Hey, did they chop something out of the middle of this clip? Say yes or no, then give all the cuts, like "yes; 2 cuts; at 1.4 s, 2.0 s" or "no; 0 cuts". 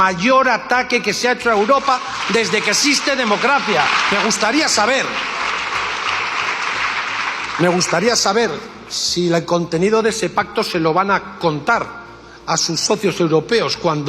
yes; 1 cut; at 4.0 s